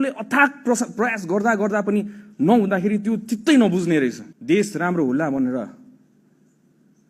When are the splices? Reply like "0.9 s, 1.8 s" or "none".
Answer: 4.3 s